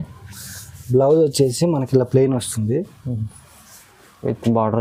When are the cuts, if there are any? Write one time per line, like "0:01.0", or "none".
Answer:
none